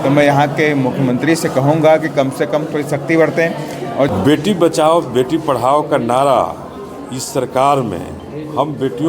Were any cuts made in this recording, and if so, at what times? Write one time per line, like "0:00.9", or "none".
0:04.1